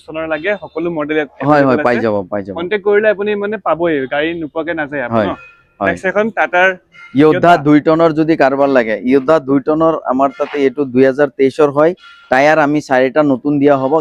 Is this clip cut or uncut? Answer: uncut